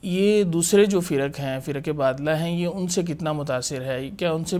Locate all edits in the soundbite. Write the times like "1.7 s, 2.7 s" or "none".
none